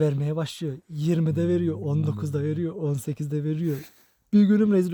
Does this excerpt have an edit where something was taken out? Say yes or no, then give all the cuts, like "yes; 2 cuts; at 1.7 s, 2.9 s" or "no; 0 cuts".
no; 0 cuts